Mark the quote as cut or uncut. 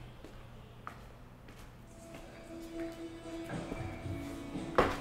cut